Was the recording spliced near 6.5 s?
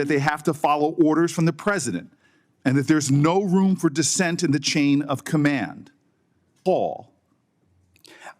yes; 1 cut; at 6.5 s

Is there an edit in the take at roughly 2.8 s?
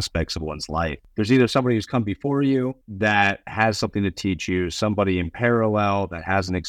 yes; 2 cuts; at 1.0 s, 2.8 s

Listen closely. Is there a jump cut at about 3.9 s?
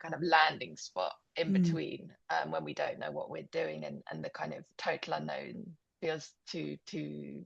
no; 0 cuts

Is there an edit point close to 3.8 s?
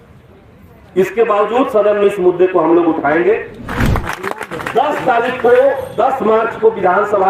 yes; 1 cut; at 3.8 s

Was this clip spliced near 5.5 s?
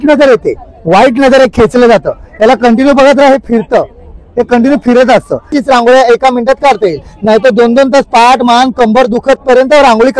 yes; 1 cut; at 5.5 s

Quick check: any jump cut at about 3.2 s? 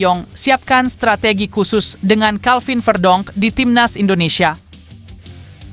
no; 1 cut; at 4.6 s

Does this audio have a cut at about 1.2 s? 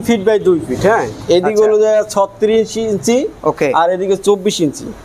no; 0 cuts

